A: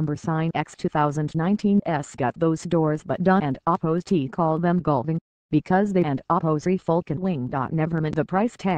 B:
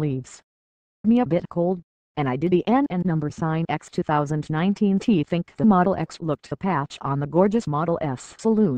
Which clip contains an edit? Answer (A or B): A